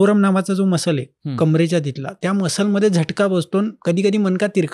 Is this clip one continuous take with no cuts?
no; 2 cuts; at 2.2 s, 3.8 s

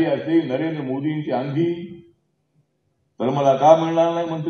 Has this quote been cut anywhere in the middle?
no; 0 cuts

